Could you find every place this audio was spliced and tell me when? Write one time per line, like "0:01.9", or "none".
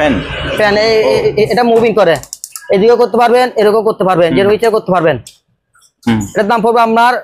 none